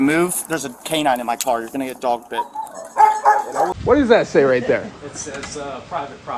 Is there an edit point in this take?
yes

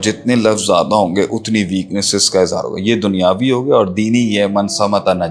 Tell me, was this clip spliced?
no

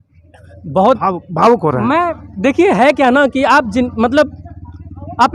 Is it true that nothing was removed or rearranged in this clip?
yes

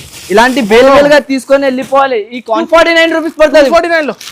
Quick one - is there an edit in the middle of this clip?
yes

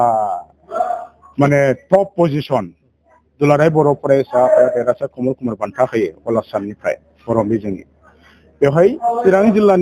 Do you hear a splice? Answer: no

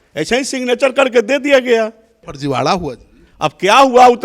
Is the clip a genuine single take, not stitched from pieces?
no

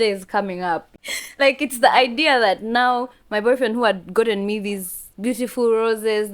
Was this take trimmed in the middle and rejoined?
yes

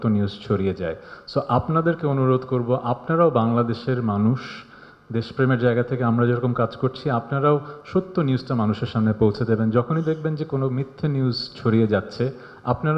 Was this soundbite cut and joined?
no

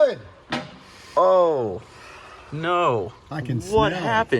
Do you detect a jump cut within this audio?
yes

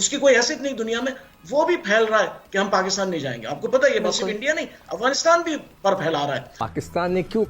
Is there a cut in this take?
yes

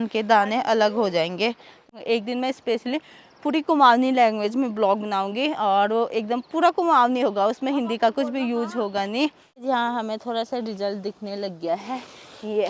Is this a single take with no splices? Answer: no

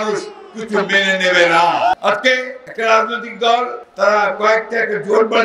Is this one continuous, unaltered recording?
no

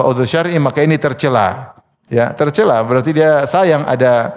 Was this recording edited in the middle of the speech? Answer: no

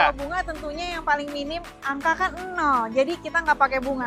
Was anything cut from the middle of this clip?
no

